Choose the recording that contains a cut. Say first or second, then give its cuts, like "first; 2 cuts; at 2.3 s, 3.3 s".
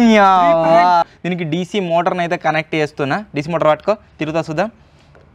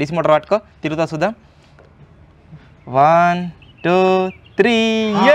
first; 1 cut; at 1.0 s